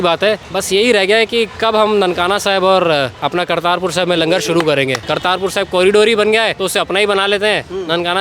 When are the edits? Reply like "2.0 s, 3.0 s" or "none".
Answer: 5.0 s, 6.6 s